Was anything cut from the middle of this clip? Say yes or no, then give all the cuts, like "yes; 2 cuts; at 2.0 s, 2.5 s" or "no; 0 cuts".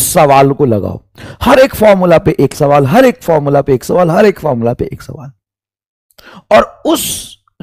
no; 0 cuts